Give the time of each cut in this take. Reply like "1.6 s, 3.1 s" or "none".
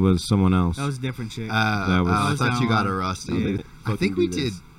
3.6 s